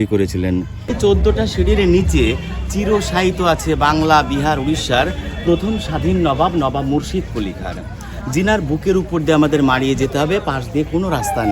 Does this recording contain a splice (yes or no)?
yes